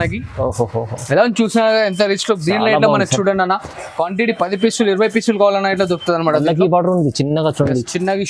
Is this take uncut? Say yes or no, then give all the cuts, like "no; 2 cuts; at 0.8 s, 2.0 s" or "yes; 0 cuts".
yes; 0 cuts